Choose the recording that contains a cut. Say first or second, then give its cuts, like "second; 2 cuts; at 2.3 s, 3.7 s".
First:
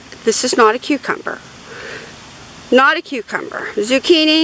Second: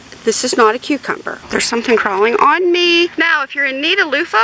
second; 2 cuts; at 1.4 s, 3.1 s